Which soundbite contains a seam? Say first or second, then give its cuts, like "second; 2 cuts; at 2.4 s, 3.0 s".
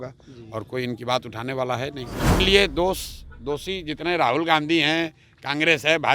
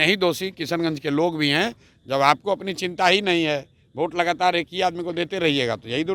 first; 1 cut; at 2.4 s